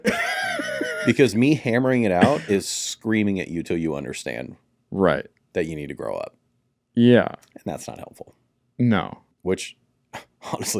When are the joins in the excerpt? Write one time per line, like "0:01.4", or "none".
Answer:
0:09.3